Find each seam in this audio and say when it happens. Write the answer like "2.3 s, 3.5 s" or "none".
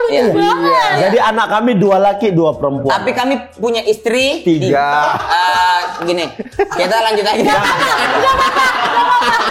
none